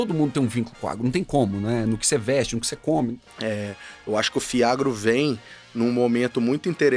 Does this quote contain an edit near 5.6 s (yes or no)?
no